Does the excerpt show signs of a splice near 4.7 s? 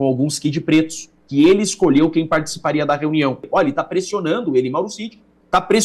no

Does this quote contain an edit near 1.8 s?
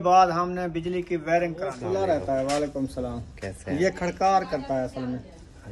yes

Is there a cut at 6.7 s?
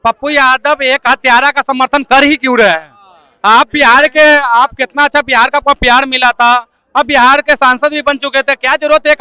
no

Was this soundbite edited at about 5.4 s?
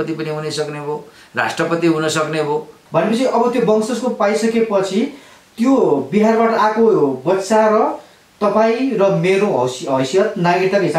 no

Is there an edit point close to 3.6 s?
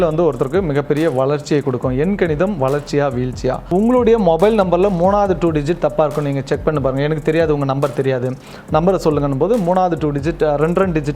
yes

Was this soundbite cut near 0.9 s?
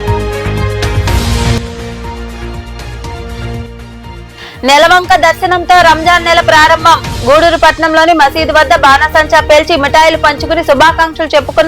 yes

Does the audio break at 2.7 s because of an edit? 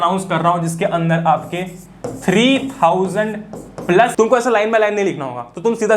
no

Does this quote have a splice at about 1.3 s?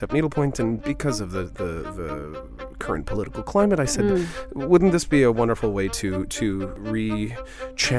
no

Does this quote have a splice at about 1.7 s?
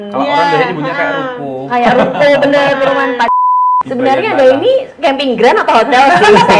no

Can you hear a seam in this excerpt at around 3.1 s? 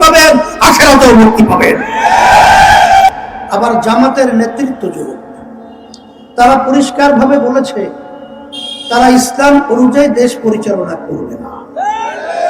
yes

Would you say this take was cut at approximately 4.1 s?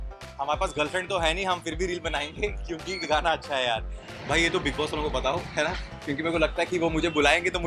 yes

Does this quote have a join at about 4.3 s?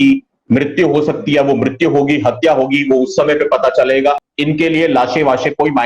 yes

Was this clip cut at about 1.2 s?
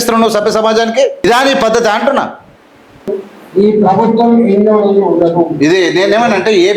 yes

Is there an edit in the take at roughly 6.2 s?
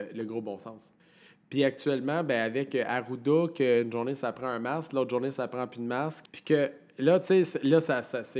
yes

